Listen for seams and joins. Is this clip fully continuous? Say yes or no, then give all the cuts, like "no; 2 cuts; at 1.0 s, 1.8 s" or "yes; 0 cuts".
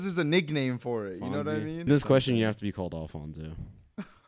no; 1 cut; at 1.9 s